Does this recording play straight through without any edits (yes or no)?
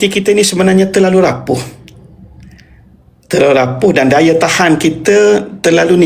yes